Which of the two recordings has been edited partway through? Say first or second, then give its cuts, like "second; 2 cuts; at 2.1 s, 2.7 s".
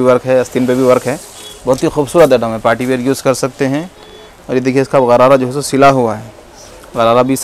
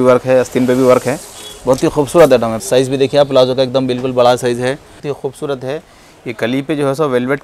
second; 2 cuts; at 2.5 s, 5.0 s